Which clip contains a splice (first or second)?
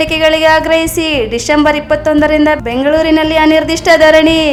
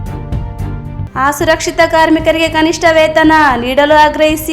second